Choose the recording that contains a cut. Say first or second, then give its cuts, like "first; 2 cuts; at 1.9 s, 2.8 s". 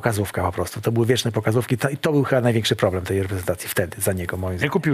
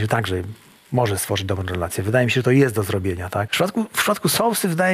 second; 1 cut; at 3.5 s